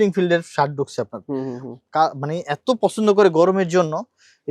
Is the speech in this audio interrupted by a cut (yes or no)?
no